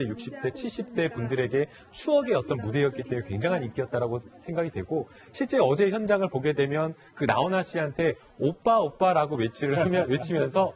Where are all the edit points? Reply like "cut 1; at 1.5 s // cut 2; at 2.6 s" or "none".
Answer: cut 1; at 8.5 s